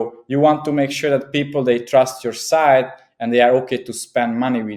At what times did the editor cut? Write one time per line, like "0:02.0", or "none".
none